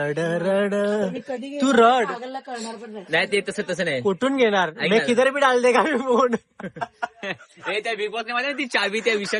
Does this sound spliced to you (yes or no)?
no